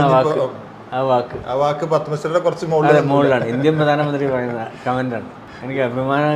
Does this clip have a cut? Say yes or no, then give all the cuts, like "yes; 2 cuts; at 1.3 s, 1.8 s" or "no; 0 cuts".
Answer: no; 0 cuts